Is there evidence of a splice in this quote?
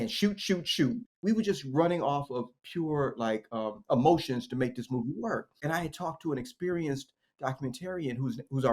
yes; 2 cuts; at 1.1 s, 5.5 s

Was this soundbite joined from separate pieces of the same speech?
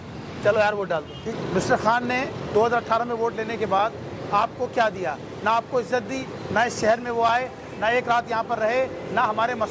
yes; 1 cut; at 1.2 s

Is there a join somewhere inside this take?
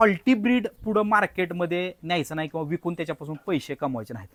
no; 0 cuts

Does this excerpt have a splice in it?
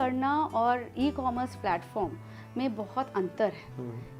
no; 0 cuts

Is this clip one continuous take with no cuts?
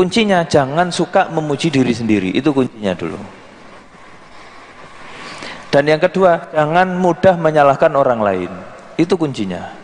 yes; 0 cuts

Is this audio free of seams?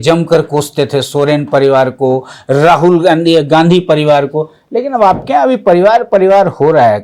yes; 0 cuts

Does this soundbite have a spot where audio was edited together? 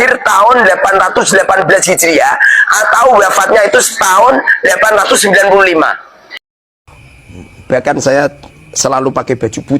yes; 1 cut; at 6.7 s

